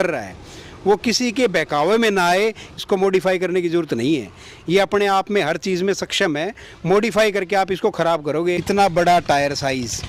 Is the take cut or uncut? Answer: cut